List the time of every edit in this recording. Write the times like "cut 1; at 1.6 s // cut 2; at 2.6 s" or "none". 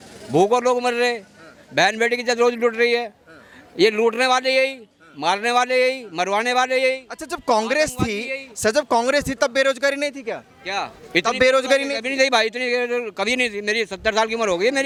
none